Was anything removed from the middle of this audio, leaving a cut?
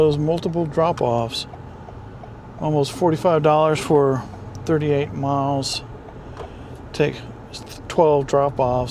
no; 0 cuts

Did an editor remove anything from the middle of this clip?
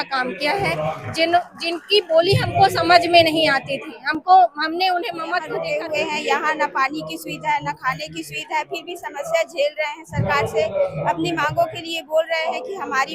yes; 1 cut; at 5.5 s

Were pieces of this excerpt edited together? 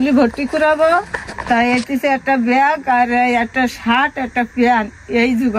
no; 0 cuts

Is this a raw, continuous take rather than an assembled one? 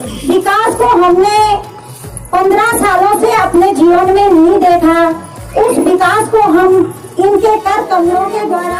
yes; 0 cuts

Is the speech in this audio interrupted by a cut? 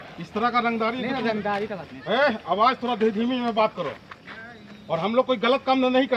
no; 0 cuts

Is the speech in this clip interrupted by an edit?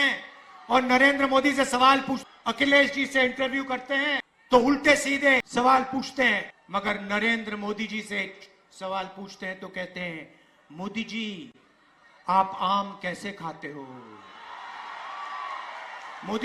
yes; 4 cuts; at 2.2 s, 4.3 s, 5.5 s, 6.6 s

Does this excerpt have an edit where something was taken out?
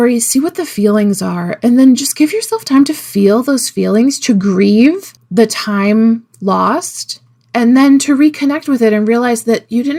no; 0 cuts

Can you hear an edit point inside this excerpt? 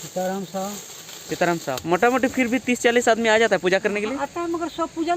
yes; 1 cut; at 1.8 s

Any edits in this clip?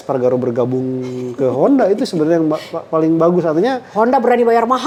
no; 0 cuts

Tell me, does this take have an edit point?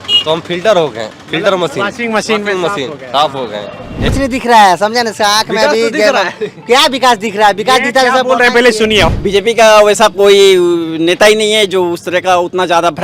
yes; 2 cuts; at 4.0 s, 9.1 s

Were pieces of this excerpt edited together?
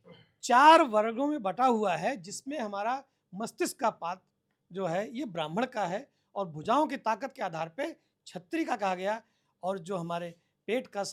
no; 0 cuts

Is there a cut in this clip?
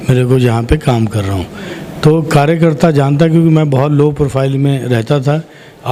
no; 0 cuts

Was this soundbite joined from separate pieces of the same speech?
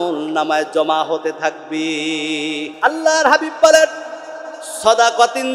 yes; 1 cut; at 2.7 s

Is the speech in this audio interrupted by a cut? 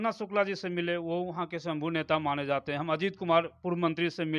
no; 0 cuts

